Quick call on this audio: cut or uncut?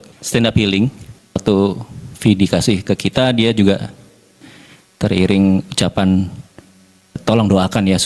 uncut